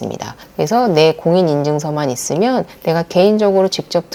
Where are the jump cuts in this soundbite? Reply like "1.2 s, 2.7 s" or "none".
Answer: none